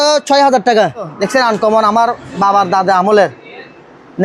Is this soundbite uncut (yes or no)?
no